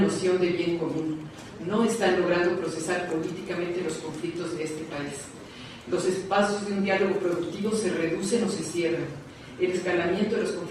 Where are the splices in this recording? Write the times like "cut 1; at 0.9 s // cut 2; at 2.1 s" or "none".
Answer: cut 1; at 6.4 s